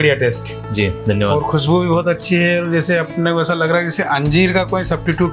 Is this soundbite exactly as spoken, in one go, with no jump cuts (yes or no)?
yes